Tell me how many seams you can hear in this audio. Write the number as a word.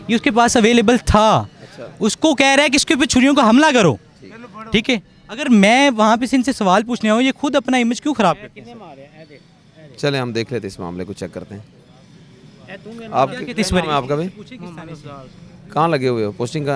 zero